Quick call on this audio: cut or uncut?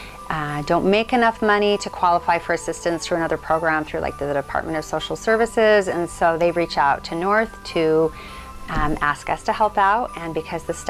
uncut